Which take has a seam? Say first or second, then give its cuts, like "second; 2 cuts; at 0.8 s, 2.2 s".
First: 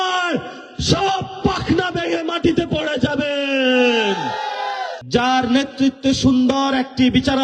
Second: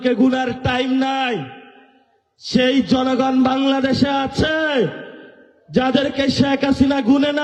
first; 1 cut; at 4.9 s